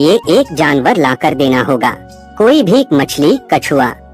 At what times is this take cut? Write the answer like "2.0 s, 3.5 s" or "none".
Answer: none